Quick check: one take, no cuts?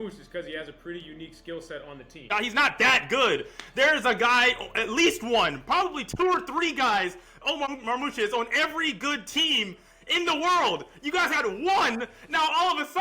no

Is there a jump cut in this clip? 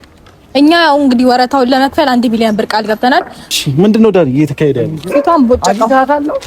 yes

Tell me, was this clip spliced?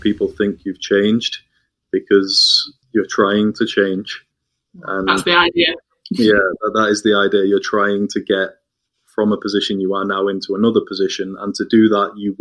no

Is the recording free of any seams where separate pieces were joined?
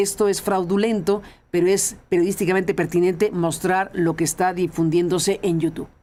yes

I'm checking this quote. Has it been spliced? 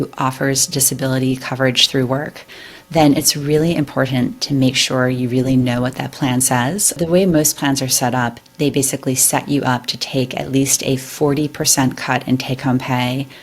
yes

